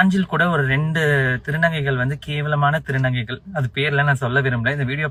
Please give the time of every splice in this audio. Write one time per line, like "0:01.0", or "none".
none